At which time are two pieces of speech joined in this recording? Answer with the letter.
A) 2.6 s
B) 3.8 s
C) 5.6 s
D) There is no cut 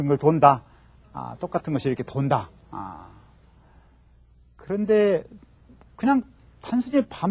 B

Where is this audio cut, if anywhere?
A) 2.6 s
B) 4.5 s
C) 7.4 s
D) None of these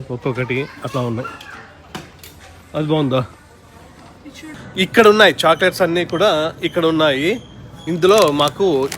B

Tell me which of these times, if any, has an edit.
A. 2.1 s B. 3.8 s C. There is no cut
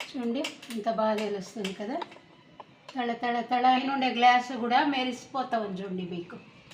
B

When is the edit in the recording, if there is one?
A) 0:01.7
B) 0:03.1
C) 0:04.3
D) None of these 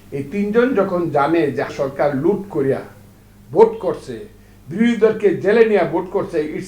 A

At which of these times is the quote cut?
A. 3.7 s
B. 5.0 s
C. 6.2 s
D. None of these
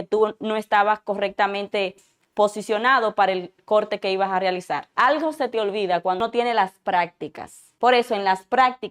C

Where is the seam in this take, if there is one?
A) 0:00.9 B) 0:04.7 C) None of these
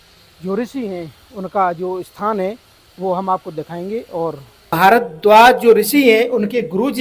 B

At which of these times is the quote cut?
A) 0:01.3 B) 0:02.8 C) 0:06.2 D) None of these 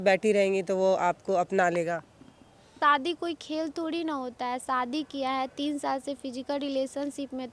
B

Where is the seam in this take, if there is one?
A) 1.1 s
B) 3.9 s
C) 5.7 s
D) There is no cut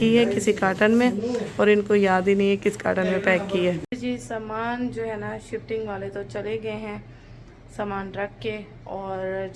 D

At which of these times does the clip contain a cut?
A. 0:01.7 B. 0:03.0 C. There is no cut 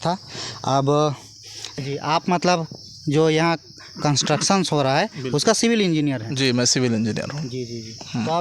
A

